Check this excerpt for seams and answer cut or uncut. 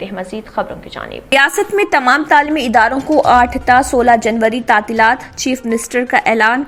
cut